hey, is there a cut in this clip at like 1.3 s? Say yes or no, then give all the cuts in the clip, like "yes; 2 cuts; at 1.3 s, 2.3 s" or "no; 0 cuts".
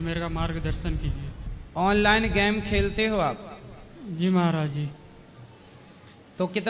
no; 0 cuts